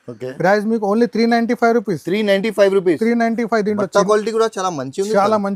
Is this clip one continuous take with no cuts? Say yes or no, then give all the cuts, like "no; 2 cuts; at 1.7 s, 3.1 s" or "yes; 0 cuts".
yes; 0 cuts